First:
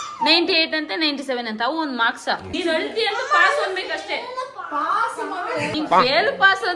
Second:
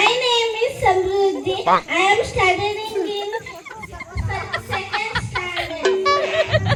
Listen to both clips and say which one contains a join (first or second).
first